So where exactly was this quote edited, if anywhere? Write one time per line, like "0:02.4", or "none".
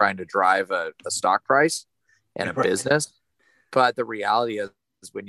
0:03.3